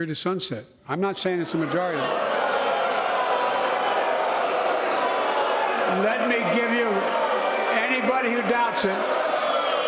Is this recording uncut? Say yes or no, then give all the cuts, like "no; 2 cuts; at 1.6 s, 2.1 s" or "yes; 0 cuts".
yes; 0 cuts